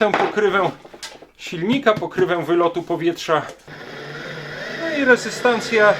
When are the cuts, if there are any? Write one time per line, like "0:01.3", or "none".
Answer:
0:03.6